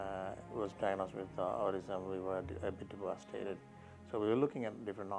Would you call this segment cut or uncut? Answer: uncut